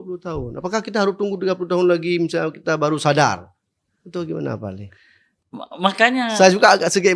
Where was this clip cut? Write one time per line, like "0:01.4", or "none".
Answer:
none